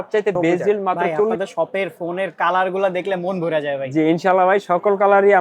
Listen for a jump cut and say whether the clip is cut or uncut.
cut